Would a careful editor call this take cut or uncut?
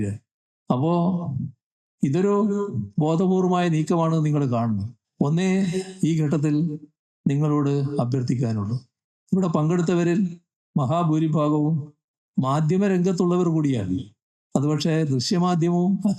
cut